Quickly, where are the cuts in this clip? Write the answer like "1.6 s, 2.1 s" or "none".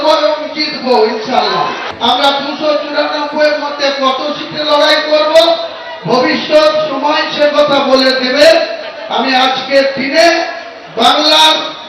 1.9 s